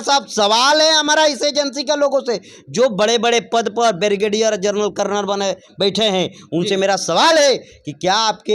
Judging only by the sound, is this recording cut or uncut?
uncut